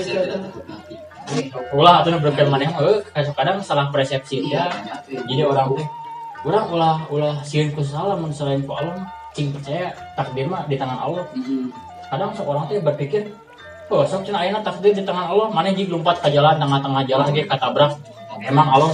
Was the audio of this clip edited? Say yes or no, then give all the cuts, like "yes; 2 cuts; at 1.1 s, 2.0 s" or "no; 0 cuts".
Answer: yes; 1 cut; at 1.4 s